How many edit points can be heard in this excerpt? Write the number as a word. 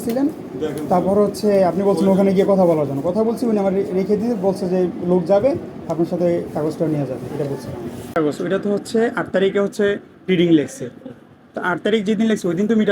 one